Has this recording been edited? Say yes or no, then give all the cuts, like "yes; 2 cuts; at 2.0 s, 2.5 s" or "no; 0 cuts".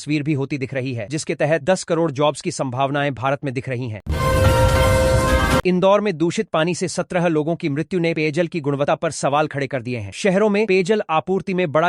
yes; 2 cuts; at 4.0 s, 5.6 s